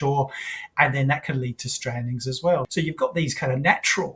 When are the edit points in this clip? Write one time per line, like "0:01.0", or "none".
0:02.7